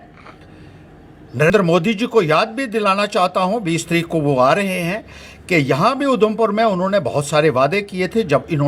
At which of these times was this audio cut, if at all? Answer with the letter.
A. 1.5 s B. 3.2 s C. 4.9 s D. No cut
A